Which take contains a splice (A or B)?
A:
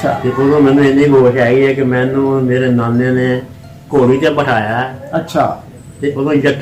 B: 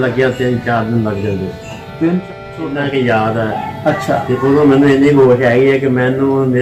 B